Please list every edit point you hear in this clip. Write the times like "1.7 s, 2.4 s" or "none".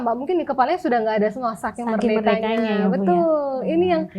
none